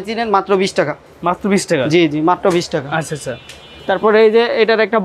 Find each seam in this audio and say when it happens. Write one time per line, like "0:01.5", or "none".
none